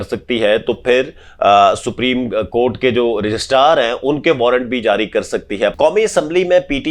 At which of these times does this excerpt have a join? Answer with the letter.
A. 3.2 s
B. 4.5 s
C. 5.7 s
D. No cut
C